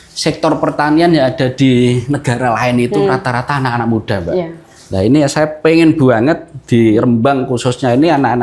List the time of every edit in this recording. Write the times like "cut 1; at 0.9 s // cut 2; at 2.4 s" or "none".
none